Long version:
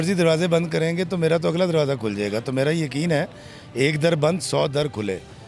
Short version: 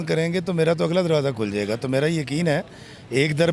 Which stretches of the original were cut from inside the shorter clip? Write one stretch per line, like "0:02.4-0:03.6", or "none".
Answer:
none